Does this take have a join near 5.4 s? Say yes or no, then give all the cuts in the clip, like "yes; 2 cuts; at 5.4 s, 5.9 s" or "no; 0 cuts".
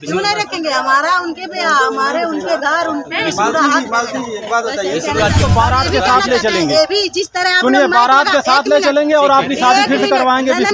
yes; 1 cut; at 5.4 s